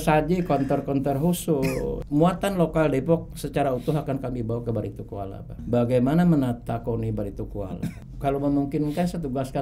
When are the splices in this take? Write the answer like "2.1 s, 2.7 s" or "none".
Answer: 2.0 s, 5.6 s, 8.1 s